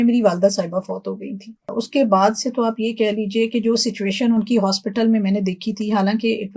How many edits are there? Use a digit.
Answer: 1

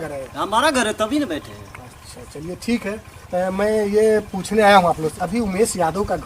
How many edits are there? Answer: 1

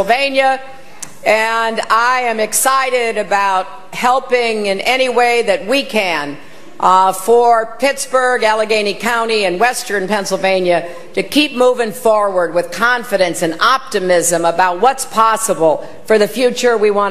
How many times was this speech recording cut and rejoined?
1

